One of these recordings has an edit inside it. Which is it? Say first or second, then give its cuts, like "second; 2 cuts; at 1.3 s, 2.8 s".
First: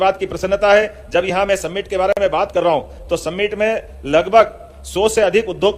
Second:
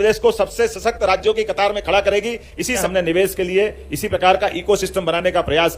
second; 1 cut; at 2.9 s